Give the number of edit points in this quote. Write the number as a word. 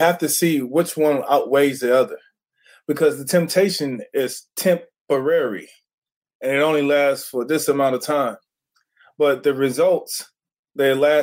zero